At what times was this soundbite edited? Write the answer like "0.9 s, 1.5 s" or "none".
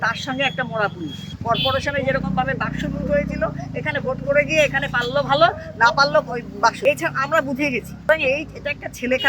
1.3 s, 6.8 s, 8.1 s